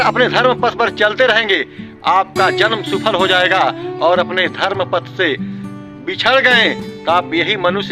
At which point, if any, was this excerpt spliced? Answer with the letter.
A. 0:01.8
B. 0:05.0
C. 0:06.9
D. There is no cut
C